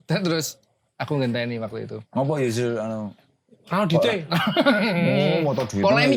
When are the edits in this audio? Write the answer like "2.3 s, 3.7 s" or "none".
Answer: none